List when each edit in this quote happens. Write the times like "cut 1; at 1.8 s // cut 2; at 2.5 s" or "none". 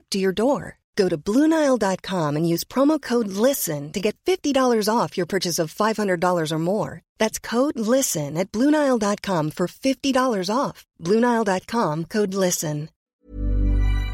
cut 1; at 12.9 s

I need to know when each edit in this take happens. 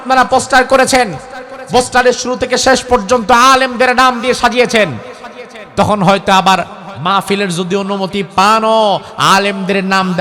none

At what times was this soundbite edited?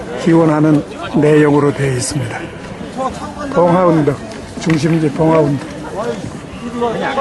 cut 1; at 2.8 s

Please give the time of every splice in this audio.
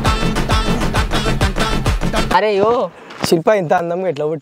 cut 1; at 2.3 s // cut 2; at 3.4 s

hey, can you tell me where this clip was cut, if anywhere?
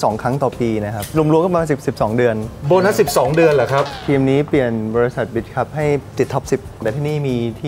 cut 1; at 1.1 s // cut 2; at 3.9 s // cut 3; at 6.8 s

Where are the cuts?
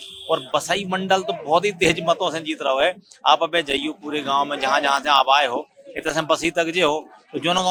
none

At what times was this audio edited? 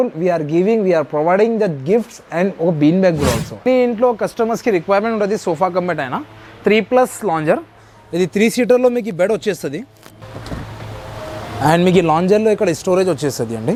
none

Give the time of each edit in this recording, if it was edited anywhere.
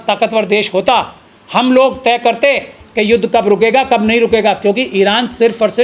none

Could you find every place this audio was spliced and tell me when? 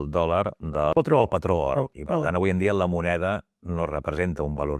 cut 1; at 0.9 s // cut 2; at 1.9 s

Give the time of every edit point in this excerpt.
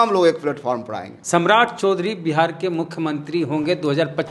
cut 1; at 1.1 s

